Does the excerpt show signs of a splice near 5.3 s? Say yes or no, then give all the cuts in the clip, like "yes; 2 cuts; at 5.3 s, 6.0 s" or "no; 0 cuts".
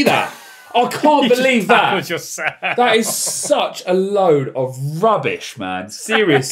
no; 0 cuts